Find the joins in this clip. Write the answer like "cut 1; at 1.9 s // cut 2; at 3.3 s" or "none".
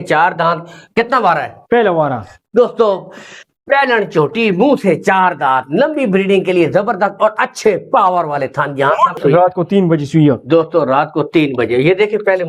cut 1; at 9.2 s